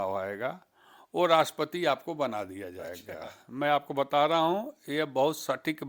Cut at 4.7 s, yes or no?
no